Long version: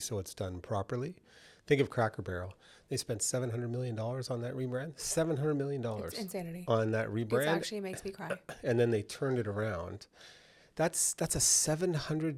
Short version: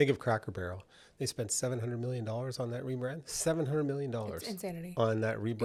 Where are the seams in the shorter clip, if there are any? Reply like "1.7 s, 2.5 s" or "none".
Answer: none